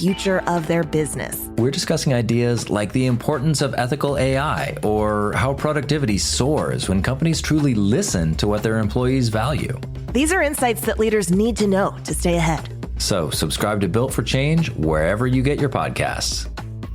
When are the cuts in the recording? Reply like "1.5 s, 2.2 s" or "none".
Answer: none